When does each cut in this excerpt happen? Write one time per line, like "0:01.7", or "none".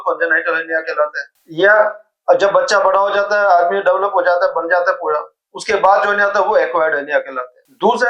none